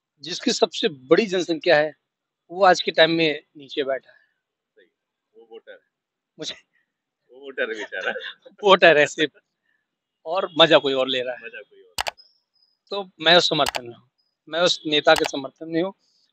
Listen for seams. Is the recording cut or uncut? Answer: uncut